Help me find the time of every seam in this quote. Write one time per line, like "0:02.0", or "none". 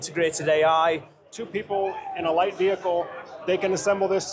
0:01.3